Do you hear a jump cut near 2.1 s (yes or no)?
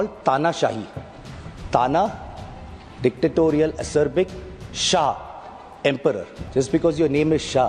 no